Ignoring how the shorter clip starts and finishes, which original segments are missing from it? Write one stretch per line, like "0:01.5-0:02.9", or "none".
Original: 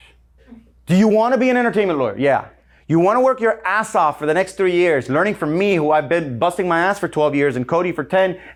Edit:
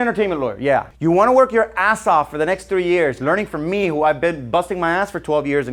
0:02.5-0:02.8